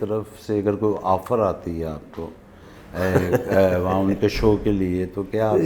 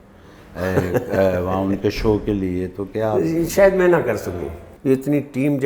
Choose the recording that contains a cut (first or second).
second